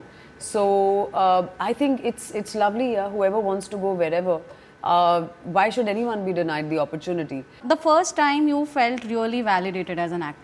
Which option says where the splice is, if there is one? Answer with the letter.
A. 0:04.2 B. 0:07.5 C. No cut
B